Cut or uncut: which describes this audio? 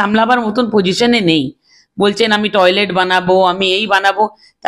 uncut